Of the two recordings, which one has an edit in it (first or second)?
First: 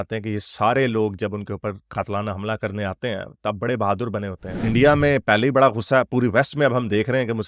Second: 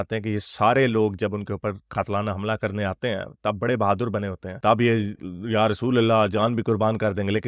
first